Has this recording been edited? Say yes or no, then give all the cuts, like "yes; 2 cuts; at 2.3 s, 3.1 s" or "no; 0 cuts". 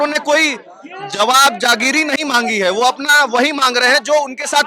no; 0 cuts